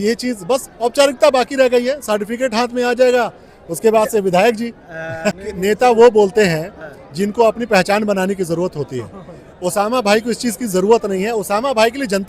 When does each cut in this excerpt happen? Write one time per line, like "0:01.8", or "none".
0:05.5